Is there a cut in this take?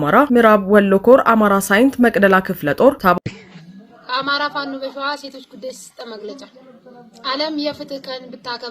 yes; 1 cut; at 3.2 s

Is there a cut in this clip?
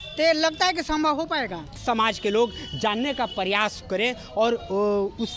yes; 1 cut; at 1.8 s

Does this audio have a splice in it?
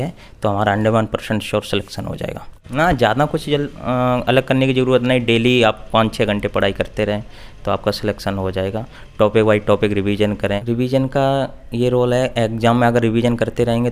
yes; 2 cuts; at 2.6 s, 10.6 s

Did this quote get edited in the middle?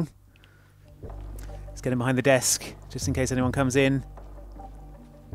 yes; 1 cut; at 1.0 s

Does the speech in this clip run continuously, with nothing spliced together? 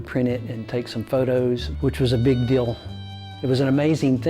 no; 1 cut; at 1.7 s

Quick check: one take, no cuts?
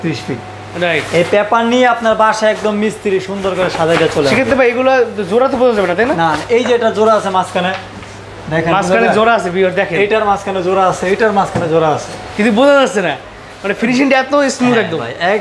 yes; 0 cuts

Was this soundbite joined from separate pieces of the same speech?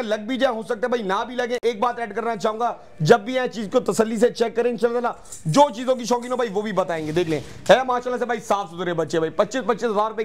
no; 0 cuts

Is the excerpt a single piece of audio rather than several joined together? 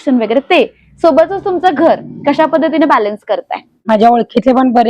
no; 1 cut; at 3.7 s

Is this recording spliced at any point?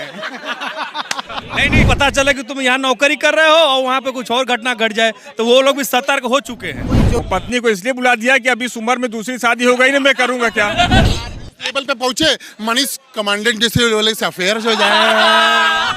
yes; 3 cuts; at 1.9 s, 7.2 s, 11.1 s

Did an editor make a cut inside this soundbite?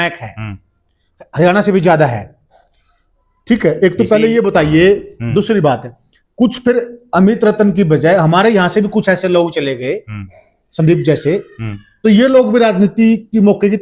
no; 0 cuts

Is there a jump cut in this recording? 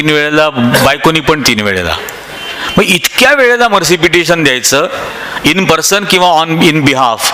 no; 0 cuts

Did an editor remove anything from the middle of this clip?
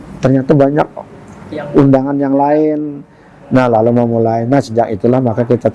no; 0 cuts

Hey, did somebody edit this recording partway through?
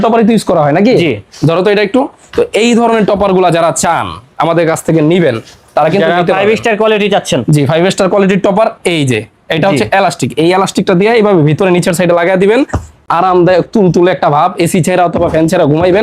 no; 0 cuts

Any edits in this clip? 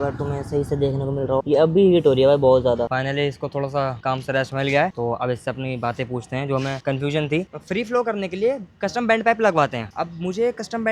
yes; 2 cuts; at 2.9 s, 7.5 s

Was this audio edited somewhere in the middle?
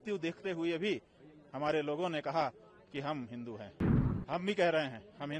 no; 0 cuts

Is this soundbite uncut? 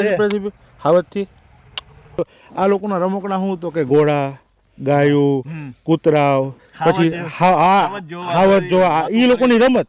no; 1 cut; at 2.3 s

